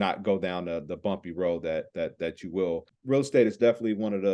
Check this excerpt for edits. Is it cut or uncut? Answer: cut